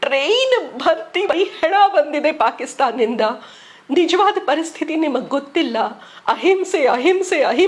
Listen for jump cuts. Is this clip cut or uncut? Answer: cut